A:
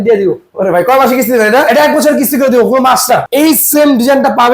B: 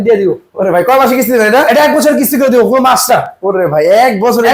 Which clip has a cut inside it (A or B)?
A